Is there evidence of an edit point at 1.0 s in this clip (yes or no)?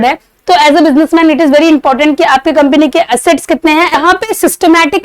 no